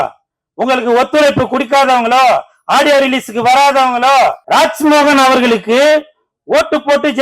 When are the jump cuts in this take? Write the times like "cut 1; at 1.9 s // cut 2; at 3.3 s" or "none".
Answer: cut 1; at 4.4 s